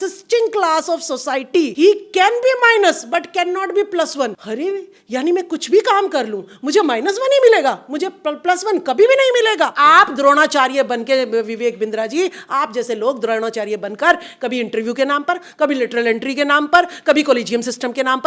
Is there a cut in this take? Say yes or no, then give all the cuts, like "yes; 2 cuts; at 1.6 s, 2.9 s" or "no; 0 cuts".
yes; 3 cuts; at 1.7 s, 4.4 s, 9.7 s